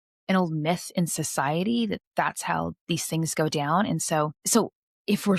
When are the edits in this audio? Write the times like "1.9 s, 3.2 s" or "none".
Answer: 4.4 s